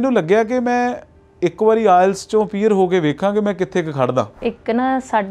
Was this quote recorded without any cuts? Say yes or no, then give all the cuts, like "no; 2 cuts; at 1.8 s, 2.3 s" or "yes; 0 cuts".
no; 1 cut; at 4.4 s